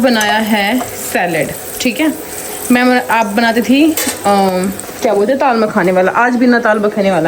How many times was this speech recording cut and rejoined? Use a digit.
0